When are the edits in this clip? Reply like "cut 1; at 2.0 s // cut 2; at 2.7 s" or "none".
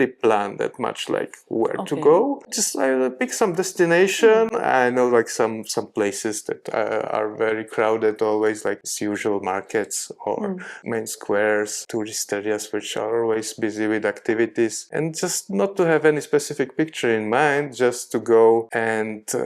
cut 1; at 2.6 s // cut 2; at 8.8 s // cut 3; at 10.7 s // cut 4; at 11.8 s // cut 5; at 14.8 s